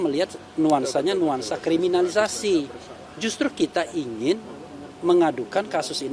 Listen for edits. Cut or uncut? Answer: uncut